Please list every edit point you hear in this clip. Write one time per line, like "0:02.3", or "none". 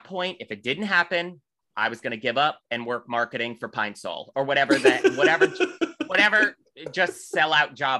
none